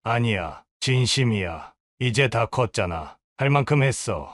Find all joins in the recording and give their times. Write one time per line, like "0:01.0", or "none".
none